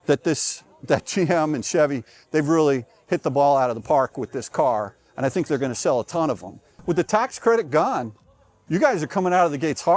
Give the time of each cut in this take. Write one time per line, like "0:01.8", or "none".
0:06.7